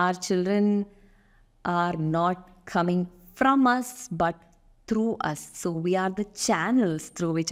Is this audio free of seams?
yes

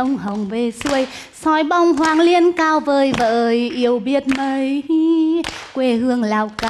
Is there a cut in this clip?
no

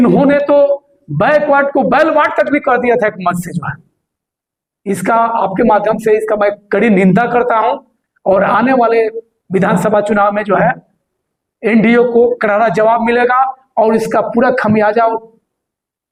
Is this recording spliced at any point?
no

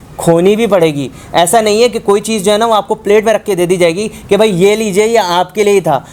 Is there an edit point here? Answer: no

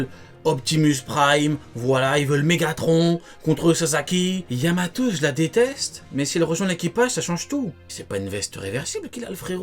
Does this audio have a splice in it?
yes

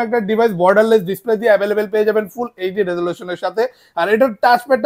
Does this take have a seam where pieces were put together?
no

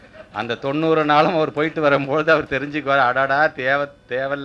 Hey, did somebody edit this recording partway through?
no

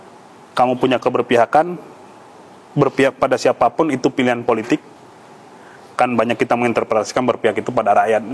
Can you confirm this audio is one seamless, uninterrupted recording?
yes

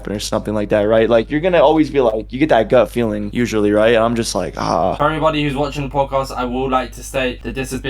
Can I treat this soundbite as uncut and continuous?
no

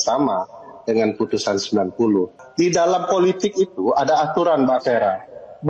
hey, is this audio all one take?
no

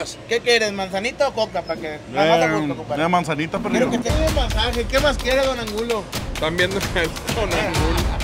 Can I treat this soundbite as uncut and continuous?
no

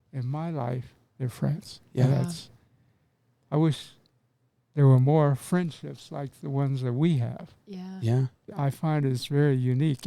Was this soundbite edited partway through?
yes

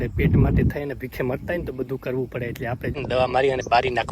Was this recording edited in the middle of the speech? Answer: yes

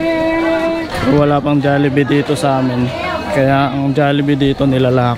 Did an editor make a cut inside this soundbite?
yes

